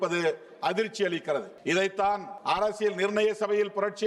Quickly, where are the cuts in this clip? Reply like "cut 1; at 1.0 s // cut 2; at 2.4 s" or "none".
cut 1; at 1.5 s // cut 2; at 2.3 s